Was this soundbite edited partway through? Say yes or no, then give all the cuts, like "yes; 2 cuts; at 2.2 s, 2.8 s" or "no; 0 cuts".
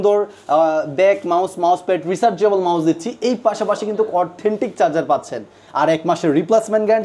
no; 0 cuts